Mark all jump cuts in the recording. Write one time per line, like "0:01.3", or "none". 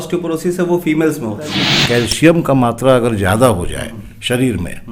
0:01.8